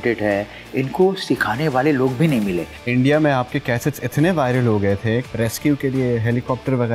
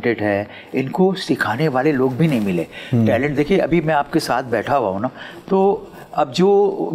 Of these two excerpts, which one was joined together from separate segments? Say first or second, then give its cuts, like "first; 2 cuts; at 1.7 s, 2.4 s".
first; 2 cuts; at 2.7 s, 5.2 s